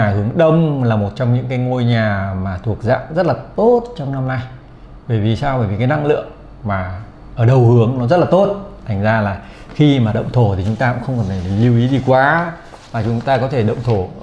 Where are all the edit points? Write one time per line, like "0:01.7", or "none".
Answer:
none